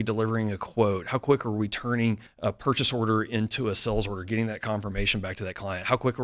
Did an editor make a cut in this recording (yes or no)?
yes